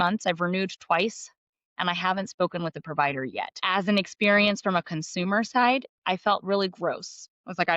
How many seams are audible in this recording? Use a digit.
1